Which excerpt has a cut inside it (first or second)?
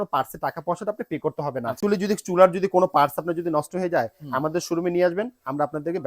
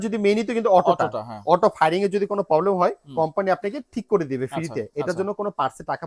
first